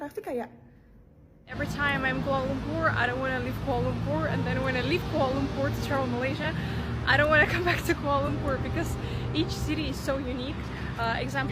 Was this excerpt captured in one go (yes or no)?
no